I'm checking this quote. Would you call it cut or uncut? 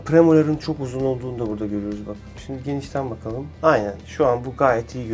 cut